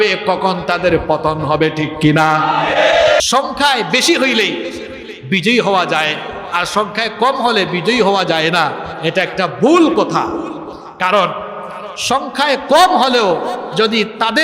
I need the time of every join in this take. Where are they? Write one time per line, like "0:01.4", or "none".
0:03.2